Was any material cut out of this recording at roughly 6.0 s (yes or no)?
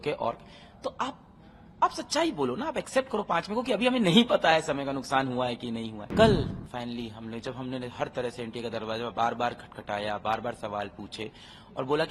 yes